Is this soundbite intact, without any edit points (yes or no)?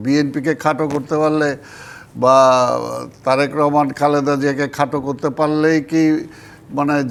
yes